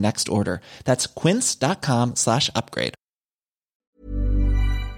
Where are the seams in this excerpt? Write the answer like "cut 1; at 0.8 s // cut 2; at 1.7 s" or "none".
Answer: cut 1; at 3.9 s

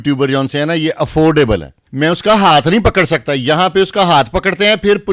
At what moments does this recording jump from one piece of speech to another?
cut 1; at 1.8 s

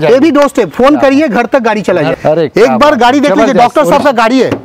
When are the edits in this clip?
cut 1; at 2.1 s

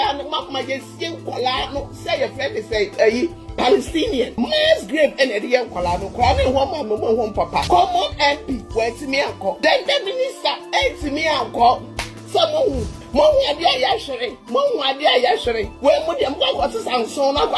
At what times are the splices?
cut 1; at 4.3 s // cut 2; at 7.6 s // cut 3; at 9.6 s // cut 4; at 12.9 s // cut 5; at 15.7 s

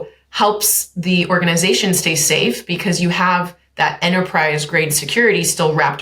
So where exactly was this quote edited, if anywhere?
none

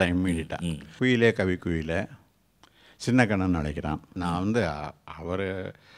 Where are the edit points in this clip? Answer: cut 1; at 0.9 s // cut 2; at 4.2 s

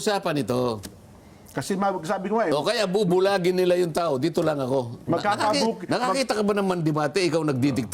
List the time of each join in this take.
none

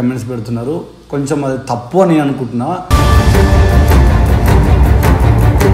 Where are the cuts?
none

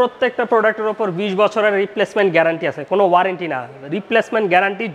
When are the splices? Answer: none

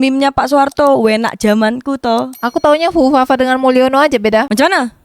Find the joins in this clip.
none

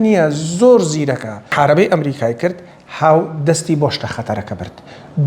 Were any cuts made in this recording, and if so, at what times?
cut 1; at 1.4 s

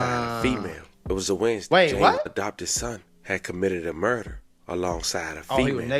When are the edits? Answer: none

